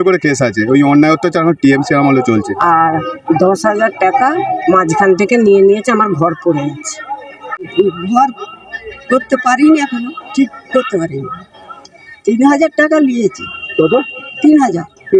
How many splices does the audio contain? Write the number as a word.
two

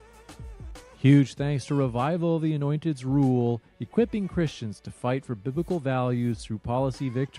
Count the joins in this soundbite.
one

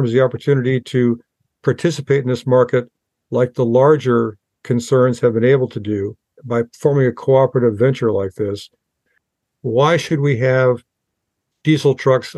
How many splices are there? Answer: two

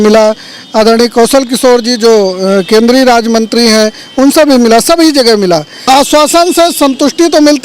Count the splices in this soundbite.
one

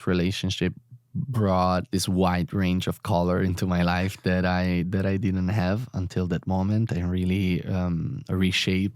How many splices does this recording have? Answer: one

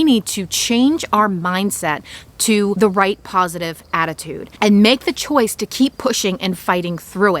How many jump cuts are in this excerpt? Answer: one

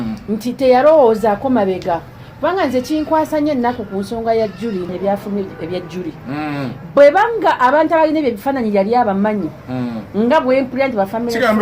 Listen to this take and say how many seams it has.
one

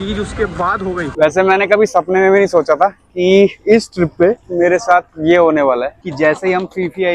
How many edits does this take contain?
two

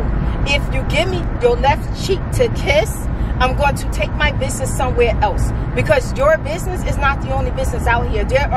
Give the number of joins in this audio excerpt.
one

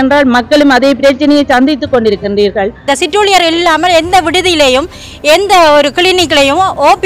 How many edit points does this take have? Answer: one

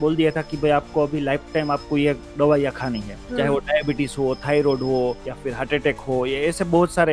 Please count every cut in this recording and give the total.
two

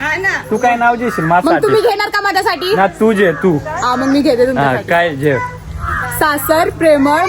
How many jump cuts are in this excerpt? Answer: zero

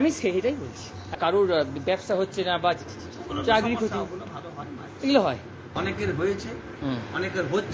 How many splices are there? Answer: two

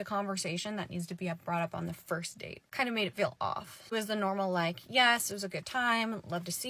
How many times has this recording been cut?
one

